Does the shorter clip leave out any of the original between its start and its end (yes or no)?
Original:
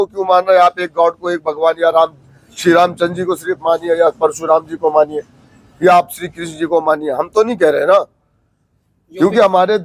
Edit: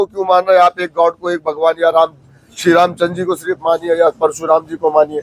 no